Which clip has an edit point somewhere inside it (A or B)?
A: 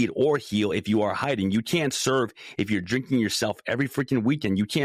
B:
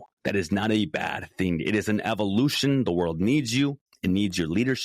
B